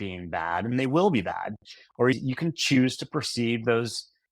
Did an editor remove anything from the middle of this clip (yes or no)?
yes